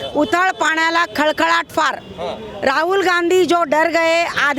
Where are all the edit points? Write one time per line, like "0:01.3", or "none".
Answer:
none